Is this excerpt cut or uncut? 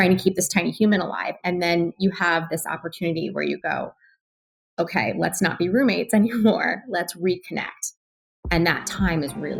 uncut